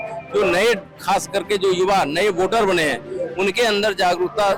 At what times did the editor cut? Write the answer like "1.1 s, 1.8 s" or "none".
none